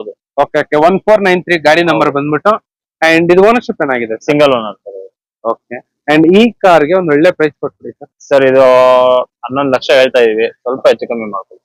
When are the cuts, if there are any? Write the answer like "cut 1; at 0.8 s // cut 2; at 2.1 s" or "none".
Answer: none